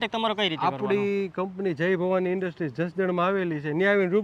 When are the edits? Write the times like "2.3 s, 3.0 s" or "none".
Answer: none